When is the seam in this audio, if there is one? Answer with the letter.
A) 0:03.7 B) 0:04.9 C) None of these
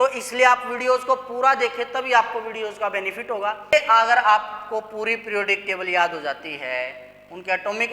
A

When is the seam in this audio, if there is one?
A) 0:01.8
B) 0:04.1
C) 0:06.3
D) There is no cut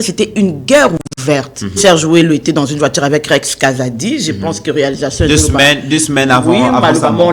A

